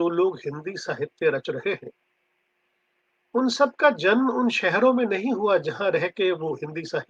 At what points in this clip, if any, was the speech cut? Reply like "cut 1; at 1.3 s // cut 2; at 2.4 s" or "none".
none